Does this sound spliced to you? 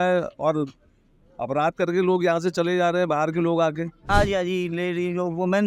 yes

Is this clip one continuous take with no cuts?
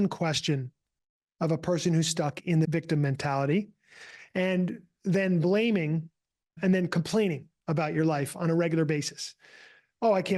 no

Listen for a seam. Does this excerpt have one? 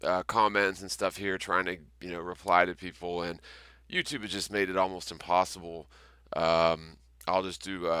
no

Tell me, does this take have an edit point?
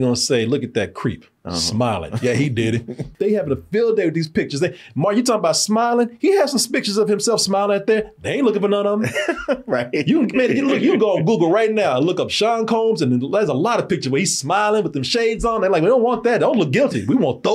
yes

